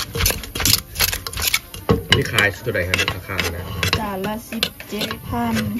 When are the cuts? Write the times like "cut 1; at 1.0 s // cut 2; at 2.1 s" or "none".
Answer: none